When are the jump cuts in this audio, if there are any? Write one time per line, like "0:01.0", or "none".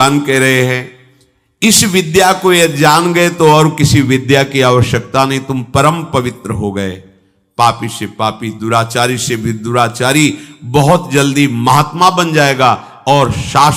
none